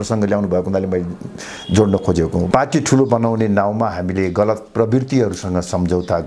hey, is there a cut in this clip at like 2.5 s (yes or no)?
yes